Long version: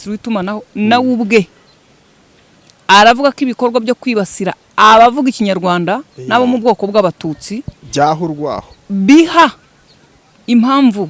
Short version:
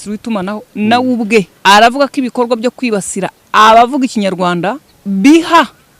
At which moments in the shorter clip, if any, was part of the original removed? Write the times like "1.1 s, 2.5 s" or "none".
1.5 s, 4.9 s